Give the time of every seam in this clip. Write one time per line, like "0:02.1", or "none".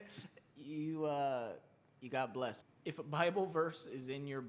0:02.6